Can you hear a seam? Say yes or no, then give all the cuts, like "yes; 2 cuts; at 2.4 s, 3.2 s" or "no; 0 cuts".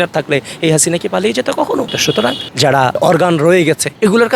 yes; 1 cut; at 2.4 s